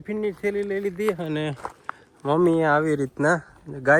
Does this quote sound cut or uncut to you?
uncut